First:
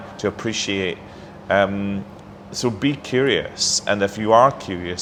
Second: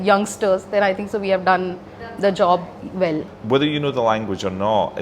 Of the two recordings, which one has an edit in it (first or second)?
second